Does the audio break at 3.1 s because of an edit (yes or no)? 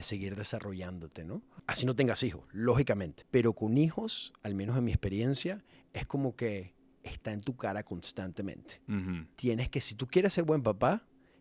yes